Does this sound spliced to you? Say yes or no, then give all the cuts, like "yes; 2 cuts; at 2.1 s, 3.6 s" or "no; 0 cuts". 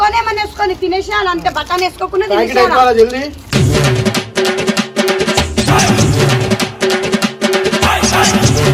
no; 0 cuts